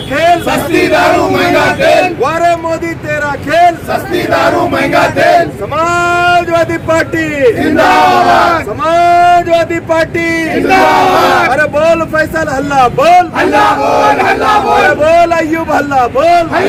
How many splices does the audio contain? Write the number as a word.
zero